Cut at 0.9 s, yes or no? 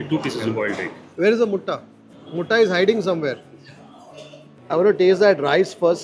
no